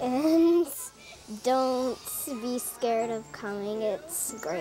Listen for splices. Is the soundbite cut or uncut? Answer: uncut